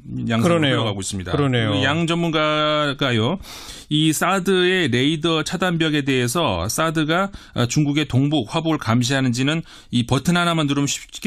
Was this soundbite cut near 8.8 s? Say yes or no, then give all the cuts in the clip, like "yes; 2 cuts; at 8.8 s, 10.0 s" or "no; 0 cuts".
no; 1 cut; at 4.2 s